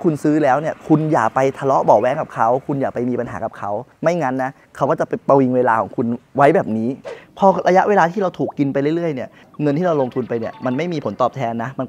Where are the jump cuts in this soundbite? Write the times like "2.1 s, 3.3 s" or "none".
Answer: 3.9 s, 7.1 s